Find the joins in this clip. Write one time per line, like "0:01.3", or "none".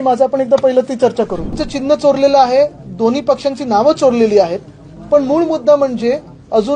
0:01.7